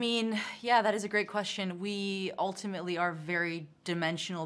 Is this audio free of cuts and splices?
yes; 0 cuts

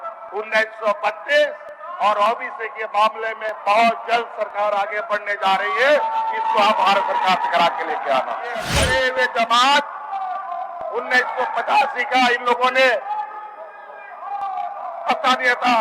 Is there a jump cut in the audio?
yes; 1 cut; at 8.8 s

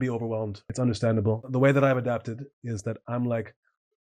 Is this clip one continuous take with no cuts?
no; 1 cut; at 1.5 s

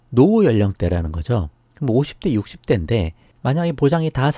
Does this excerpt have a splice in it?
no; 0 cuts

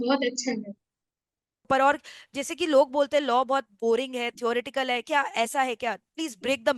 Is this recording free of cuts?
no; 1 cut; at 1.7 s

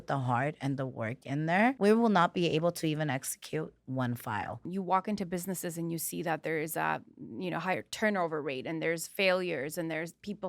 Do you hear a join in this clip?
yes; 2 cuts; at 1.8 s, 4.7 s

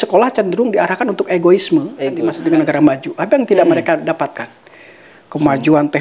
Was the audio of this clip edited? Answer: yes; 1 cut; at 2.3 s

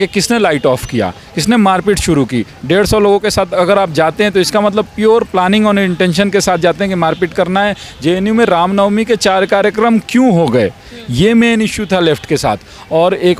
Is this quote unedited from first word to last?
yes; 0 cuts

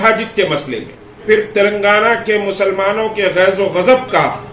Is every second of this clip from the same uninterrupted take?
no; 1 cut; at 1.2 s

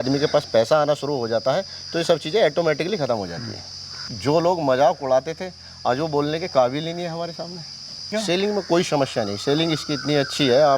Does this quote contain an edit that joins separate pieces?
yes; 2 cuts; at 3.9 s, 8.1 s

